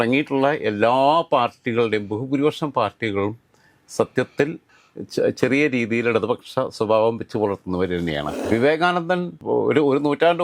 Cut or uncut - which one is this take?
cut